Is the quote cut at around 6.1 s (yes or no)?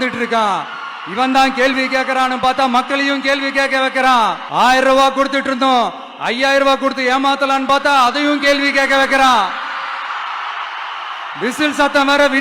no